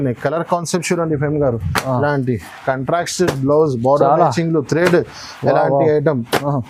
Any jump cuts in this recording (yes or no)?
no